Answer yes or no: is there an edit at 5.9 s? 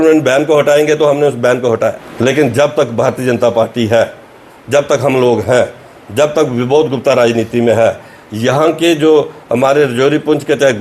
no